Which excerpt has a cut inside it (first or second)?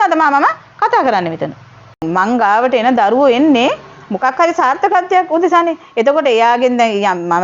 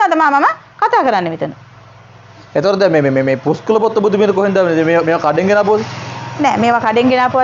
first